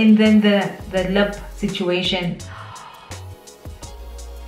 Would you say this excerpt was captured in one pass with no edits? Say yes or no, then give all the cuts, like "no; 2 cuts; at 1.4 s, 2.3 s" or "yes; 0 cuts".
no; 1 cut; at 2.9 s